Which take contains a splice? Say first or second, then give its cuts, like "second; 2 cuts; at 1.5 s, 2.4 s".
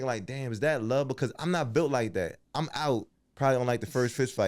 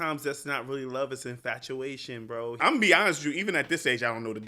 second; 1 cut; at 2.6 s